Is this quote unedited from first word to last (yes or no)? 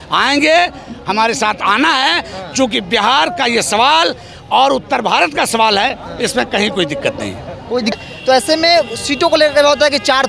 no